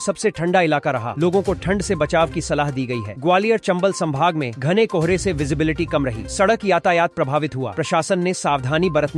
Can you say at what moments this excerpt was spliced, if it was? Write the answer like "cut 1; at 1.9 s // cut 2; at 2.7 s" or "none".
none